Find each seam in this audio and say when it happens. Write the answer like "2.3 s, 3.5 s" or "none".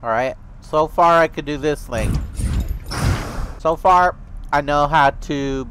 3.5 s